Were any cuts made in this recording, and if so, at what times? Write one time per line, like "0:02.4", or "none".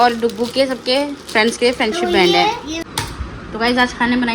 0:02.8